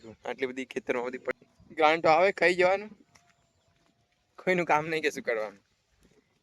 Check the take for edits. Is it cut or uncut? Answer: cut